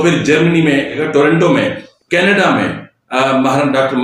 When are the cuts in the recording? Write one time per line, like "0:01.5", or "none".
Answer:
0:01.0
0:01.9